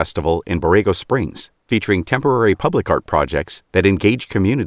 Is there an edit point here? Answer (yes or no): no